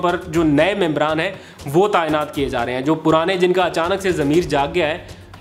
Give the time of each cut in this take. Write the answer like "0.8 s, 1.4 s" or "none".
none